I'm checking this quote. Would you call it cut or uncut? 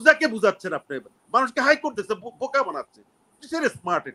uncut